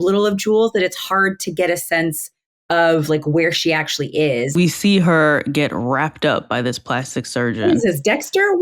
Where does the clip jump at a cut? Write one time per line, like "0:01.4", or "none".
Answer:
0:04.5